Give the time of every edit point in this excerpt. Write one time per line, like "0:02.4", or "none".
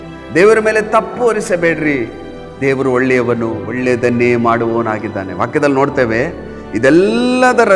0:03.6